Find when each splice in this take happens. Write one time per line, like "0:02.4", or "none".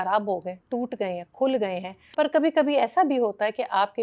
0:02.0